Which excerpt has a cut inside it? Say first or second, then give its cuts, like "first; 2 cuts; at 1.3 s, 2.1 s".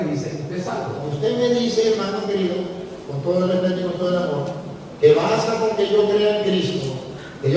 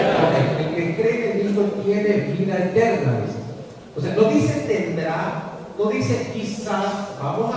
first; 1 cut; at 1.0 s